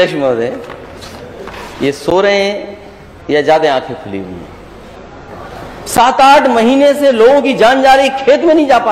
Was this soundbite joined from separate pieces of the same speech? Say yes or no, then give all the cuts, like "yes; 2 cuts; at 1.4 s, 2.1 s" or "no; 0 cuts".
yes; 1 cut; at 4.9 s